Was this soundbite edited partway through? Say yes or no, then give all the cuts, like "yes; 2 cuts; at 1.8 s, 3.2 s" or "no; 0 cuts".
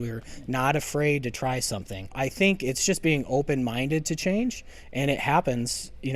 yes; 1 cut; at 2.1 s